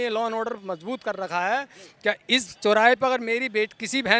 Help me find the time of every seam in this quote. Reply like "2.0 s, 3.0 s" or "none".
none